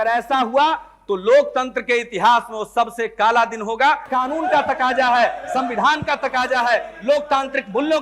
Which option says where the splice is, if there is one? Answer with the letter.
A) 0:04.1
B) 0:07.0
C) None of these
A